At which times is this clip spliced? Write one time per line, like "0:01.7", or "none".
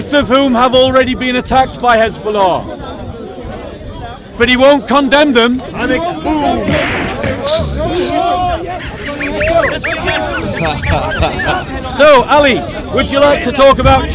none